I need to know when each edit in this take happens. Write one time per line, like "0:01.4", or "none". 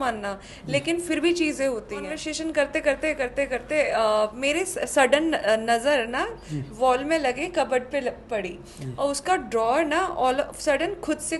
0:02.2

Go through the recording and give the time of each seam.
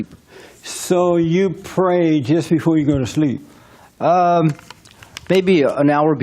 0:02.0

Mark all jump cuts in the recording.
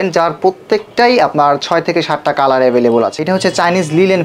0:03.2

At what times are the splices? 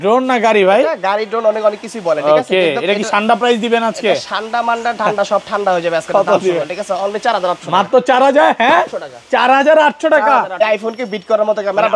0:10.6

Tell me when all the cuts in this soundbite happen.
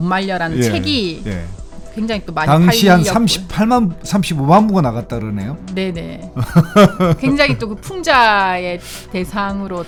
none

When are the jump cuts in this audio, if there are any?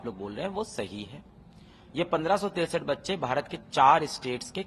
none

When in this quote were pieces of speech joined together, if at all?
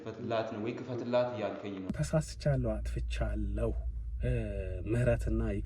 0:01.9

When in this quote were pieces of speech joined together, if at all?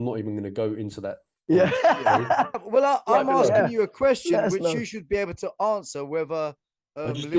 0:02.6

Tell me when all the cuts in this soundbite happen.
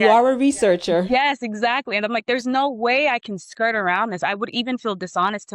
0:01.1

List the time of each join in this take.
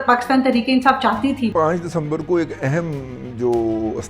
0:01.5

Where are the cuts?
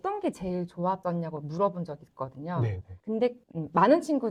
none

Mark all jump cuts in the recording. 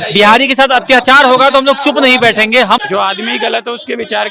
0:02.8

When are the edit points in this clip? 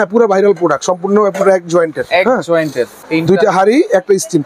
0:03.0

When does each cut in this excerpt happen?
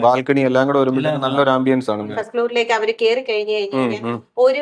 0:02.0

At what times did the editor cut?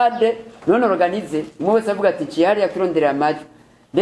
none

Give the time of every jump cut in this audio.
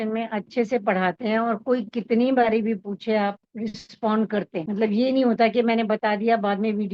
0:04.6

